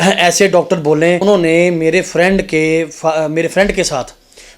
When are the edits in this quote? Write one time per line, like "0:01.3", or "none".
0:01.2